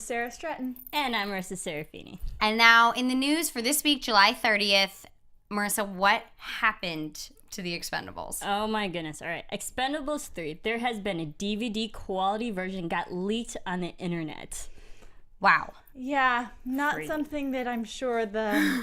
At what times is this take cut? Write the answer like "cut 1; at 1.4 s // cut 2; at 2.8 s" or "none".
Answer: cut 1; at 10.5 s